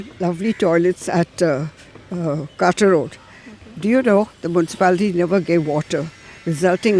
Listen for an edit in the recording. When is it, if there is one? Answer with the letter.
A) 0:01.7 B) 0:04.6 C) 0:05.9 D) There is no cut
D